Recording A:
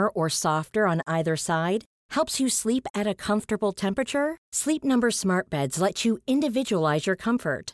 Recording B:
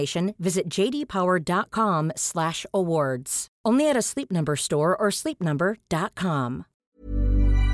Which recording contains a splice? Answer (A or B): B